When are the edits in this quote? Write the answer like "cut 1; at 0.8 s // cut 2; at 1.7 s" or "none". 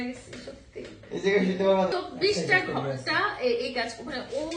cut 1; at 1.9 s